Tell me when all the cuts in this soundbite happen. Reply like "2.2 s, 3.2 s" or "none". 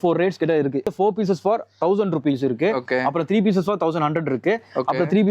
0.9 s